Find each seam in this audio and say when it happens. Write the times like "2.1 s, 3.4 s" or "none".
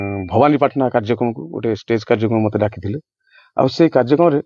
none